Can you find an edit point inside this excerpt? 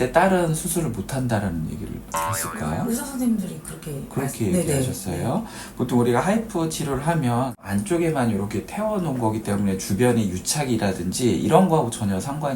no; 0 cuts

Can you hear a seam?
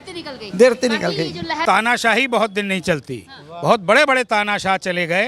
yes; 1 cut; at 1.6 s

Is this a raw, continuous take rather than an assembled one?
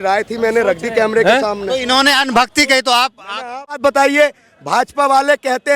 no; 1 cut; at 3.8 s

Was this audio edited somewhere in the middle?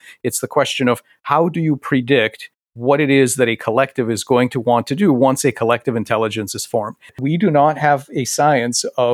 yes; 1 cut; at 7.2 s

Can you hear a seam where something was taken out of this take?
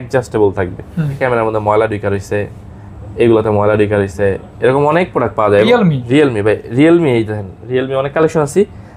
yes; 2 cuts; at 1.2 s, 5.7 s

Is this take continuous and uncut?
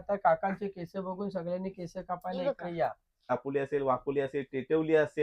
no; 1 cut; at 3.3 s

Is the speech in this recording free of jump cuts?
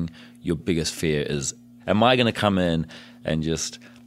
no; 1 cut; at 1.7 s

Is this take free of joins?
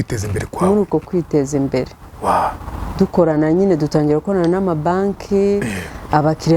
yes; 0 cuts

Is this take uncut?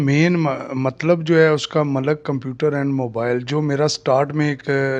yes; 0 cuts

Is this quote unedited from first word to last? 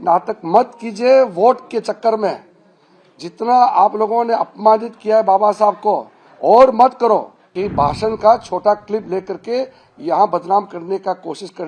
no; 1 cut; at 7.4 s

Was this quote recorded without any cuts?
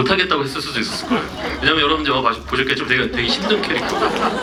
yes; 0 cuts

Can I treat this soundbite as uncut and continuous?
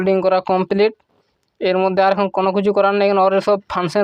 yes; 0 cuts

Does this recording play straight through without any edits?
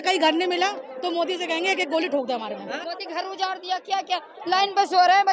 no; 1 cut; at 2.7 s

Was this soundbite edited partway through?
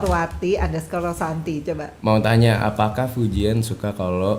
no; 0 cuts

